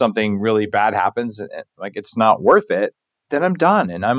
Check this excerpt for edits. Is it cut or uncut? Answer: uncut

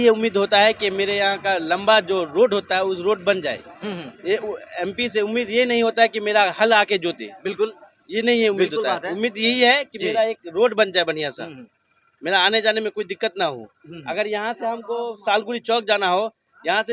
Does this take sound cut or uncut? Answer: uncut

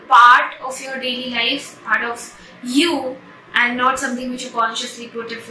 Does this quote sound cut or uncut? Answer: uncut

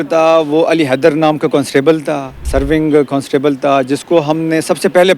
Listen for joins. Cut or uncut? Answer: cut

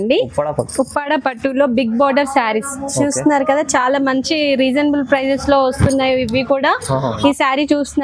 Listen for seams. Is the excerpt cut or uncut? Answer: cut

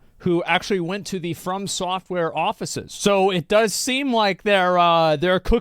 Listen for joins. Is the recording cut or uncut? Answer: cut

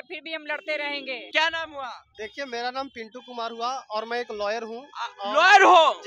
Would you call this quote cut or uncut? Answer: cut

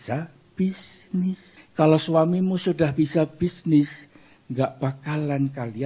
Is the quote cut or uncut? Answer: cut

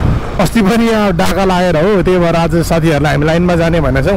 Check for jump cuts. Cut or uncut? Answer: uncut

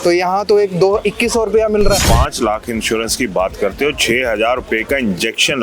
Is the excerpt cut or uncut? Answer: cut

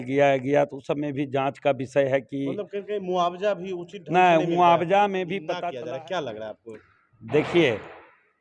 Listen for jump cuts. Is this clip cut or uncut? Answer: cut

